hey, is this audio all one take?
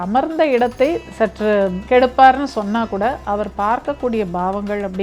yes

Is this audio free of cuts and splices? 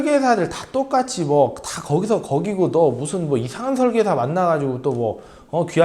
yes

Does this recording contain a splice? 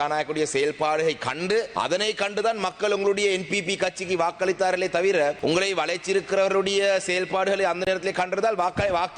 yes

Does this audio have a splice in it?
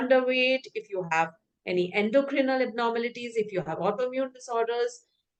no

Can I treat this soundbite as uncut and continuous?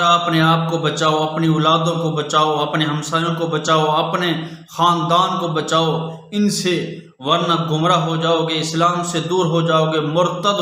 yes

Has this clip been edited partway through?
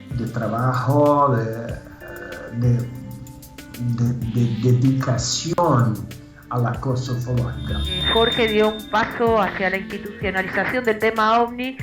yes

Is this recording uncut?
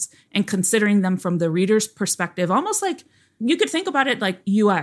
yes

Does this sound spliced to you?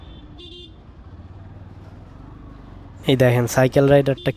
yes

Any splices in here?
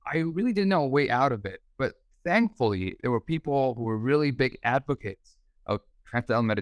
no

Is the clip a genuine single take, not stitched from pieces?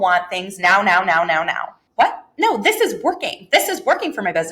no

